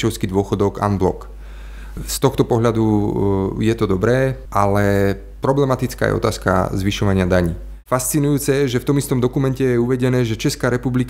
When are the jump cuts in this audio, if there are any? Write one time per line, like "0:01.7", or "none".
0:01.9
0:04.4
0:07.8